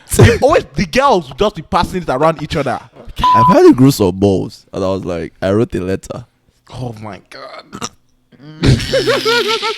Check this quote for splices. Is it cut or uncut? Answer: cut